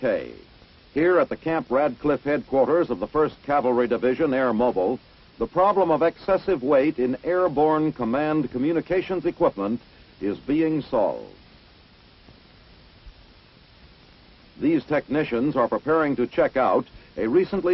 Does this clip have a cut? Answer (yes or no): no